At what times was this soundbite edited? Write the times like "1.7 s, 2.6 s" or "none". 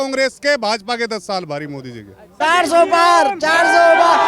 2.4 s

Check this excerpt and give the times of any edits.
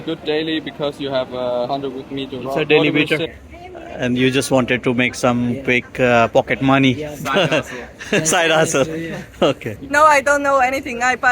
3.4 s, 9.7 s

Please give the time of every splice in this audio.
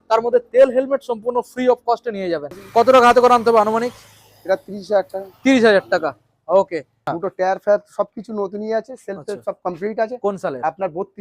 2.6 s, 7.0 s

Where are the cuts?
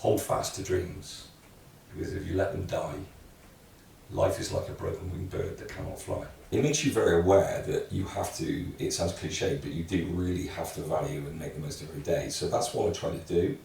6.4 s

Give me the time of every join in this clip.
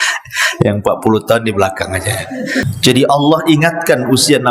2.7 s

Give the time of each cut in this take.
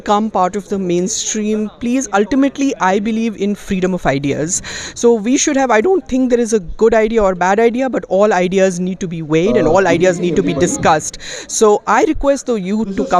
none

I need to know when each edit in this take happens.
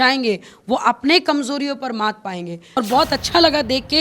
2.8 s

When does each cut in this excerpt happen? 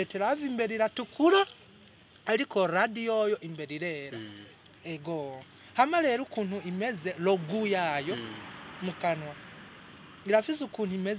none

